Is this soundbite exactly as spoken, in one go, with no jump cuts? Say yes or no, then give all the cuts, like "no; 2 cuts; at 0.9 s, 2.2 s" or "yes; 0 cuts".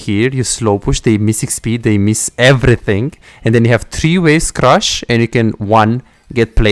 yes; 0 cuts